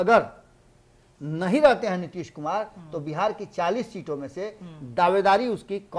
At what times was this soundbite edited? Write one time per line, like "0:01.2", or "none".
none